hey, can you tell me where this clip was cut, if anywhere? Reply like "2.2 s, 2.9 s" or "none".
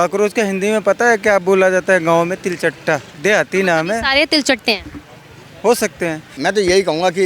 3.1 s, 6.3 s

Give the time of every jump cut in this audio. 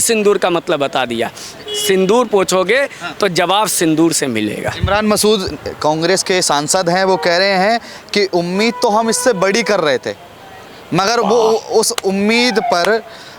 none

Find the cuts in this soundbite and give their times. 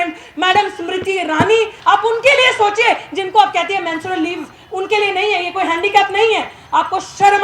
1.7 s

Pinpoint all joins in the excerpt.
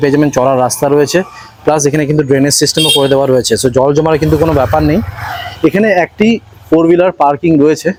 none

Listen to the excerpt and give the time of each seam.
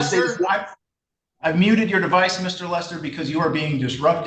none

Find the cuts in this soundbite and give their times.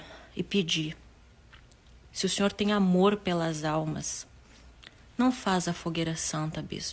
none

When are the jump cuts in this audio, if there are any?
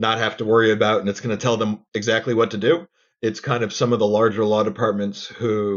none

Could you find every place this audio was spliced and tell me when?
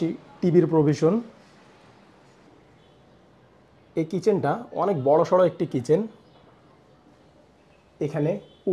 2.5 s

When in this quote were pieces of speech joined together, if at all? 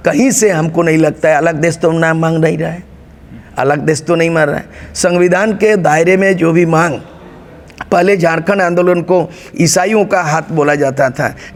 none

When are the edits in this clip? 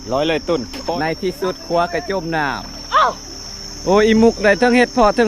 0.9 s

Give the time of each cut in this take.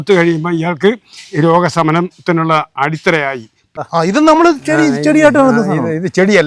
3.7 s

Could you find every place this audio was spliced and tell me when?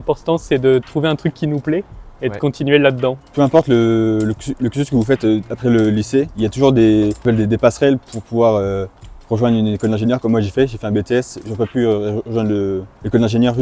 none

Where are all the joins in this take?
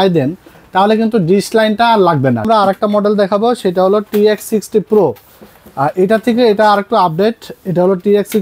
2.4 s

